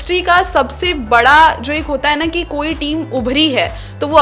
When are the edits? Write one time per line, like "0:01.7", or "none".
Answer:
none